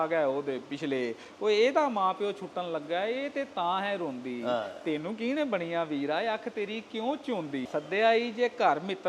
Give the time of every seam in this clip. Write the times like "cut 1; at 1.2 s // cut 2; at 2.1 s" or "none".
cut 1; at 7.6 s